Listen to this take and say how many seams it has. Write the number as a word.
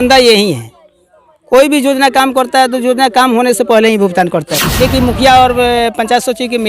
one